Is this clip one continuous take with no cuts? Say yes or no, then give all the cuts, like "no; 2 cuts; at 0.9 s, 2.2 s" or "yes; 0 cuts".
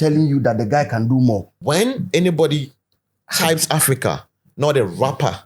no; 1 cut; at 1.5 s